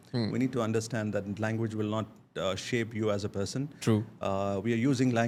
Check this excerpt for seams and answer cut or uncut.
uncut